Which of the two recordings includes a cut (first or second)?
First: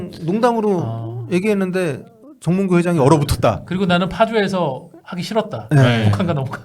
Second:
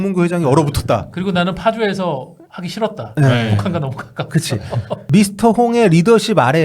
second